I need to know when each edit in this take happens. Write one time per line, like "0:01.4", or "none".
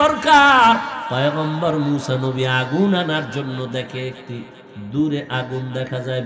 0:01.0